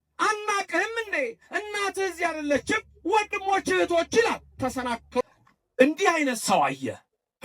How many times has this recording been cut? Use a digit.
1